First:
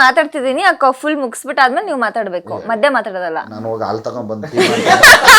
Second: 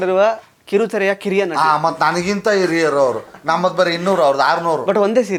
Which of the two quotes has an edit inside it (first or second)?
first